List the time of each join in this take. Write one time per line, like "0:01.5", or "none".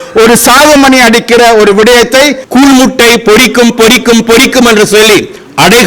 0:02.4